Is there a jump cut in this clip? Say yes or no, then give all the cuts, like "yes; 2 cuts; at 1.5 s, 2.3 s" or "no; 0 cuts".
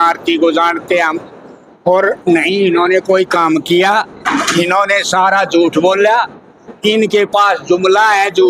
no; 0 cuts